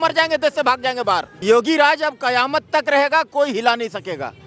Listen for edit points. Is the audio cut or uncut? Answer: cut